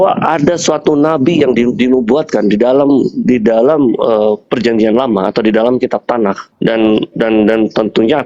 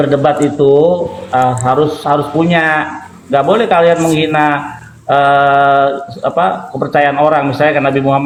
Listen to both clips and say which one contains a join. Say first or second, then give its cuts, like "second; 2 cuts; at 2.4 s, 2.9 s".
first; 1 cut; at 6.5 s